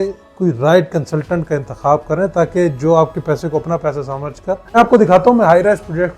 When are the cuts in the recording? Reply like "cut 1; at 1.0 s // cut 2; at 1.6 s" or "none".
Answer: cut 1; at 4.8 s